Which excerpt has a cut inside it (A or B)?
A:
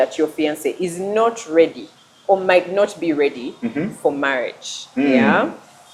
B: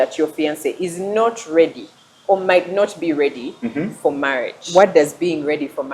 B